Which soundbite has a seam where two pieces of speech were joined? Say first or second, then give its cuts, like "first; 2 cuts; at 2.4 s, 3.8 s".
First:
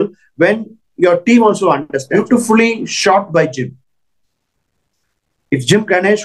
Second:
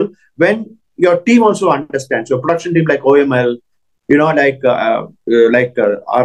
first; 1 cut; at 2.1 s